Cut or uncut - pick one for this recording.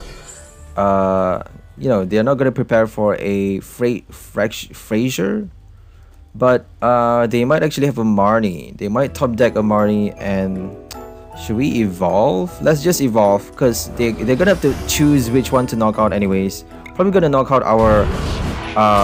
uncut